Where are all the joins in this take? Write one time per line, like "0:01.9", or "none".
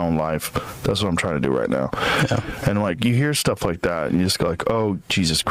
none